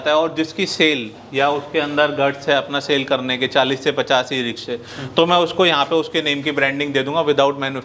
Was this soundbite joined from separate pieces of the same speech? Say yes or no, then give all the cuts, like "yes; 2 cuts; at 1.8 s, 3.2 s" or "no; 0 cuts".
no; 0 cuts